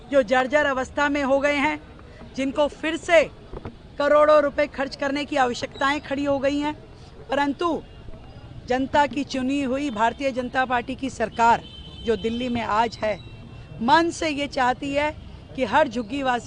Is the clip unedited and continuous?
yes; 0 cuts

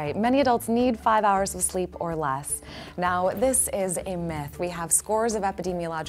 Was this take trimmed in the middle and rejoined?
no; 0 cuts

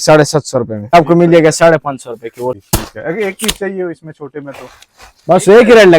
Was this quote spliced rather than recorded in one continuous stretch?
yes; 2 cuts; at 0.9 s, 2.6 s

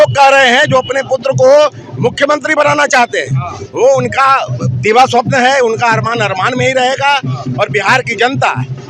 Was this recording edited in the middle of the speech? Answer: no; 0 cuts

